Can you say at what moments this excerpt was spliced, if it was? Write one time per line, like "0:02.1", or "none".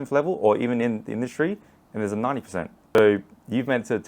0:02.8